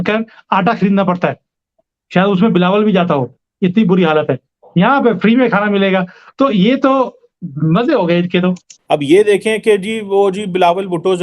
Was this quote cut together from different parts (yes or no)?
yes